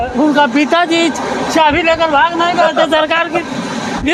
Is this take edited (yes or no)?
no